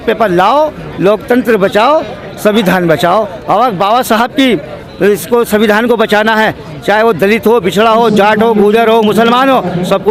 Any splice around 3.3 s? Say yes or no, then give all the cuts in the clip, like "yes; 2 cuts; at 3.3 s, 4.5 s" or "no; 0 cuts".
no; 0 cuts